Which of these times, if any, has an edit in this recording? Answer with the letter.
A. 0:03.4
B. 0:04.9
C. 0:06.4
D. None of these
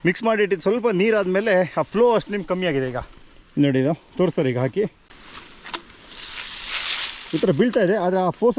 D